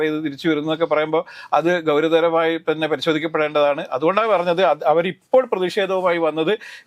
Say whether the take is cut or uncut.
uncut